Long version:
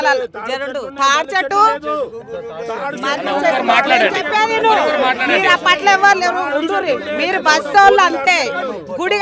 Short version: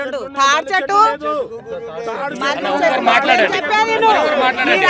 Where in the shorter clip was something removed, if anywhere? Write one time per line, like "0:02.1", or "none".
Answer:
none